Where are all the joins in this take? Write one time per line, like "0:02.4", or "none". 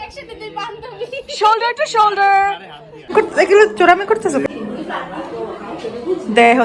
0:03.1
0:04.5